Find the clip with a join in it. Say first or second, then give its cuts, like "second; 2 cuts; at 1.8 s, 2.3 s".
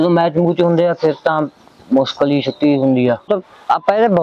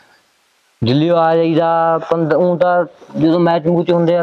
first; 1 cut; at 3.3 s